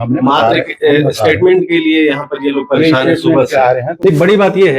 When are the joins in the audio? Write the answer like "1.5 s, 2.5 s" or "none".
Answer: 3.9 s